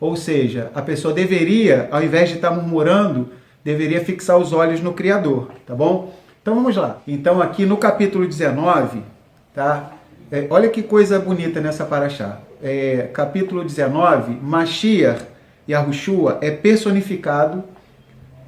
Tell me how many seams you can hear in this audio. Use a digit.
1